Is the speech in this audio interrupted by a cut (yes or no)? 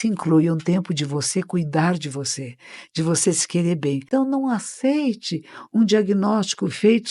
yes